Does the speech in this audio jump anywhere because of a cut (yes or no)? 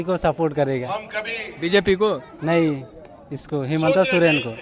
no